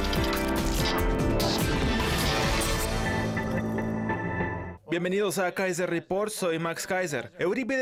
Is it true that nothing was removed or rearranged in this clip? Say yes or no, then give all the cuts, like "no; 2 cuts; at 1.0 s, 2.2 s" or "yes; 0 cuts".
yes; 0 cuts